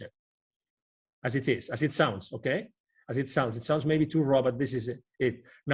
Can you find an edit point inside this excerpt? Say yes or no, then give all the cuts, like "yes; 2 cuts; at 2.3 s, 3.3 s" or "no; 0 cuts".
no; 0 cuts